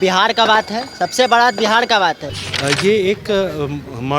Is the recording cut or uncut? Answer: cut